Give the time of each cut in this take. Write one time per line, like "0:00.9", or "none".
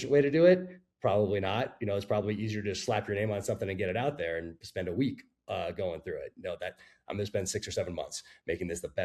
none